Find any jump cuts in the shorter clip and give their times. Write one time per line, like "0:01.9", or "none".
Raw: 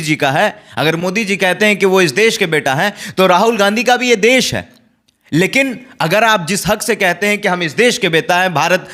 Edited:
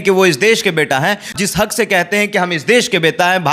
0:01.3